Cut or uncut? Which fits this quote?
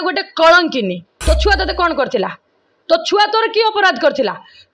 cut